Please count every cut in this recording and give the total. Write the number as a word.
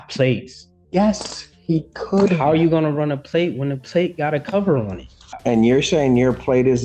one